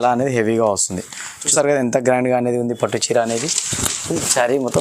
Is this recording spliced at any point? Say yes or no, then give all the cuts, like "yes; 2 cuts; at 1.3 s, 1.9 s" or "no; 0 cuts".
yes; 1 cut; at 1.4 s